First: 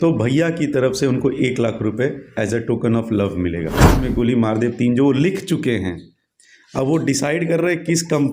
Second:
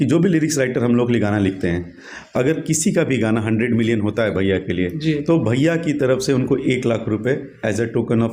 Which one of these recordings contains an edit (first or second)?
first